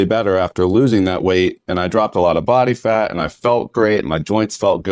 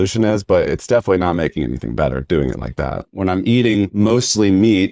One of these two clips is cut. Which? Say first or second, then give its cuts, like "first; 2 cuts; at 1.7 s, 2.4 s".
second; 2 cuts; at 3.1 s, 3.9 s